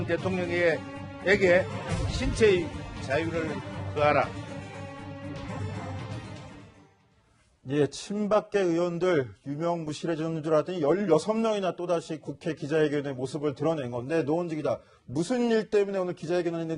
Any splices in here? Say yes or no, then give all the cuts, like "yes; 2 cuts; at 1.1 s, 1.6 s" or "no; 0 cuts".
yes; 1 cut; at 13.7 s